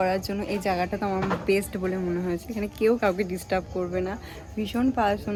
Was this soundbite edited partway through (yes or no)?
no